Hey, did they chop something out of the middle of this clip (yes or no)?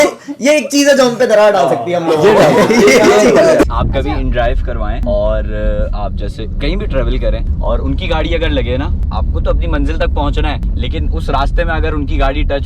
yes